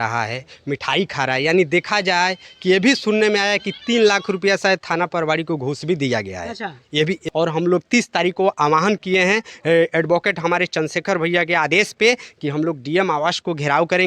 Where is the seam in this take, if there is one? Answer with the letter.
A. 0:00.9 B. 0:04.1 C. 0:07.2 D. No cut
C